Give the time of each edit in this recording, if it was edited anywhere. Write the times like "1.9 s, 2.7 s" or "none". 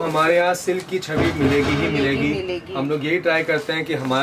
none